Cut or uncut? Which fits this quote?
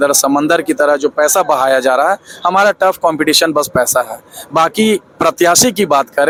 uncut